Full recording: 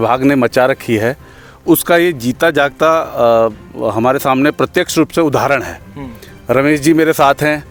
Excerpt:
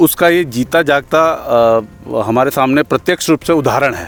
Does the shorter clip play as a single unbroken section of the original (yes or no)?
yes